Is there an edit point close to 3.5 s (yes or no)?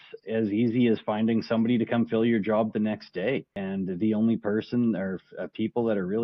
yes